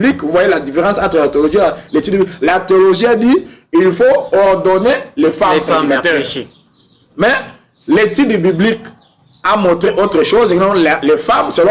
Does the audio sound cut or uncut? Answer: uncut